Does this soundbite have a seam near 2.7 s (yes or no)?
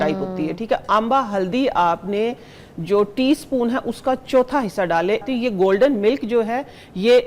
no